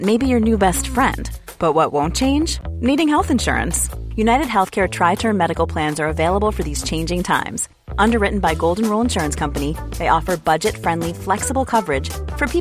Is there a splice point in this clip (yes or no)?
no